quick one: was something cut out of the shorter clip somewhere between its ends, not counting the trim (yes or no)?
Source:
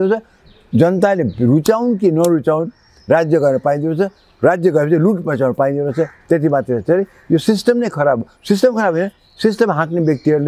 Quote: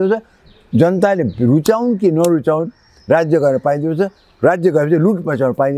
no